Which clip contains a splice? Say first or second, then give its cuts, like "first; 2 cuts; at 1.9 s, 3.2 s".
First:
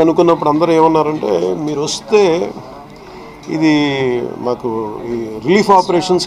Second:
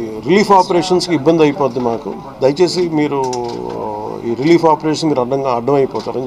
second; 1 cut; at 2.2 s